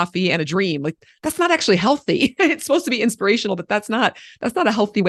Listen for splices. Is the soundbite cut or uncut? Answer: uncut